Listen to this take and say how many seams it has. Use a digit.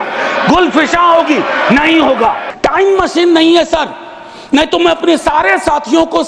1